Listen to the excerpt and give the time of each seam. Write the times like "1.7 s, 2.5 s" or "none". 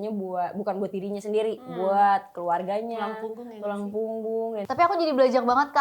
4.7 s